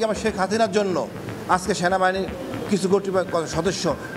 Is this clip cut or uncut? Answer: uncut